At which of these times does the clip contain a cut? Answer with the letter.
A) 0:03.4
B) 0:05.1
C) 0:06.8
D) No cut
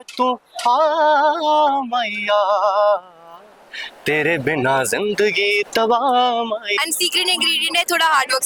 C